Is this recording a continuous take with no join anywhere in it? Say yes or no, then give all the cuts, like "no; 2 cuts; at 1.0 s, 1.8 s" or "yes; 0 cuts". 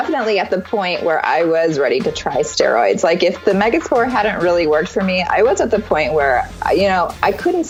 yes; 0 cuts